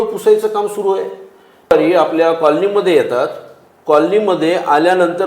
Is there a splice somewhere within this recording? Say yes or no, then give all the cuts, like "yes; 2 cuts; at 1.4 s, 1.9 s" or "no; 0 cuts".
yes; 1 cut; at 1.7 s